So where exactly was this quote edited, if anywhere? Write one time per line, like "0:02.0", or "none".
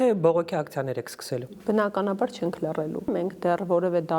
0:03.1